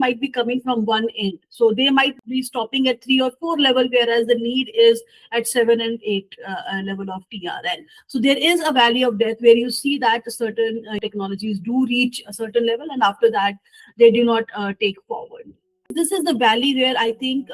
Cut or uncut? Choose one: cut